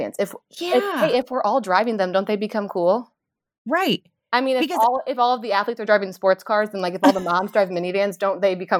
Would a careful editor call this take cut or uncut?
uncut